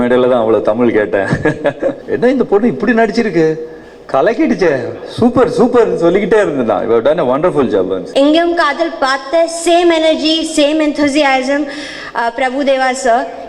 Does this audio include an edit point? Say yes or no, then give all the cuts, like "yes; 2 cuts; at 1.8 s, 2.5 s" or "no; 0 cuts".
yes; 2 cuts; at 2.0 s, 8.1 s